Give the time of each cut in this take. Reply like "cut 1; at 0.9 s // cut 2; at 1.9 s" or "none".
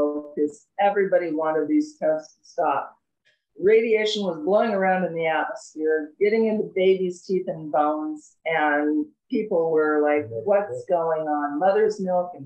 none